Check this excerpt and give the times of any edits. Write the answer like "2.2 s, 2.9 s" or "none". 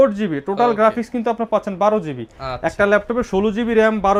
none